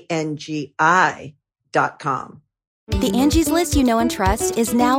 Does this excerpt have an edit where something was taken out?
yes; 1 cut; at 2.8 s

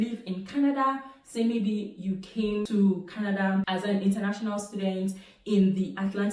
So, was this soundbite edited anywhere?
no; 0 cuts

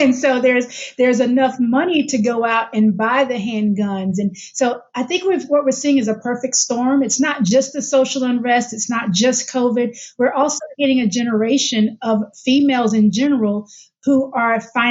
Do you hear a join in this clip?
no; 0 cuts

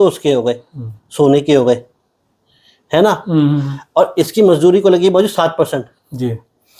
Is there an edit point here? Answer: no; 0 cuts

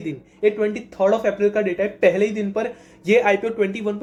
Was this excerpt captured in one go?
yes; 0 cuts

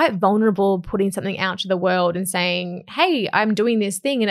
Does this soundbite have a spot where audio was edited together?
no; 0 cuts

